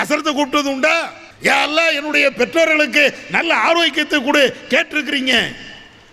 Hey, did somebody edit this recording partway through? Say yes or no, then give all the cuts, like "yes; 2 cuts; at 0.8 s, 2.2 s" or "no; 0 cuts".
yes; 1 cut; at 1.2 s